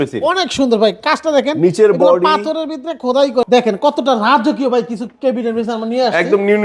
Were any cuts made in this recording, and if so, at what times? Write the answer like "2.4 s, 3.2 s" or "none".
3.4 s

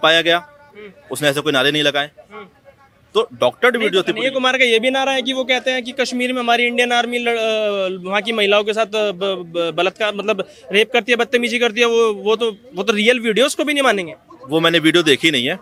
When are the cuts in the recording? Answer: none

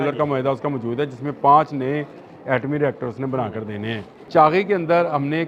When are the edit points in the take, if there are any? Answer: 4.1 s

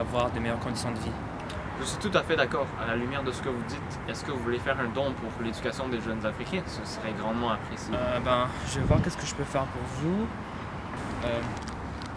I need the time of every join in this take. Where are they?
1.4 s, 11.3 s

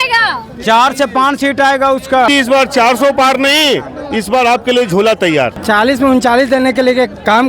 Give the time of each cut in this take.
2.3 s, 5.6 s

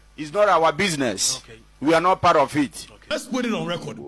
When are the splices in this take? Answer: 3.1 s

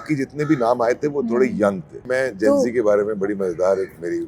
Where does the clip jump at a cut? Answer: 2.1 s

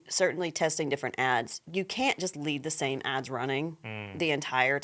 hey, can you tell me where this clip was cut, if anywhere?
none

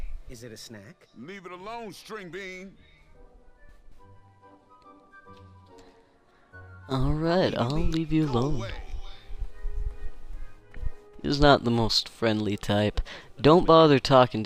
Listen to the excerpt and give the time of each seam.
none

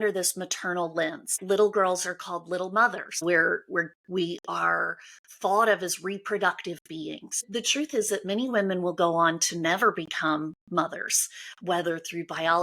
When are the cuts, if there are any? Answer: 1.4 s, 3.2 s, 7.4 s

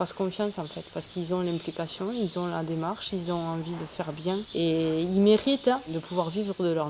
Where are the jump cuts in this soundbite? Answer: 4.5 s, 6.0 s

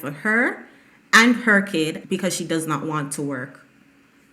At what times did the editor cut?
2.0 s

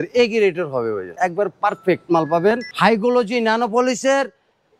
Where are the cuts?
1.1 s, 2.7 s

